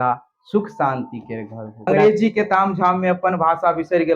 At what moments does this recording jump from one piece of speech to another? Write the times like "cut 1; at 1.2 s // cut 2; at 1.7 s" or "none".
cut 1; at 1.9 s